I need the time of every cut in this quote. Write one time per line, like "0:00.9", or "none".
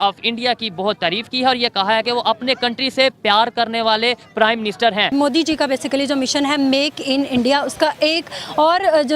0:05.1